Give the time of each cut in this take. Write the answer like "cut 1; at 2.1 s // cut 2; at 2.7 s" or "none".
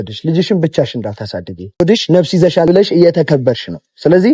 cut 1; at 1.8 s // cut 2; at 2.7 s